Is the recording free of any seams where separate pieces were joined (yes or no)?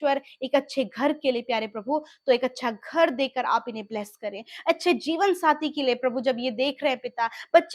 yes